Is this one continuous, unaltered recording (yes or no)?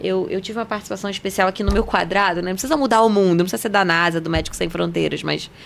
yes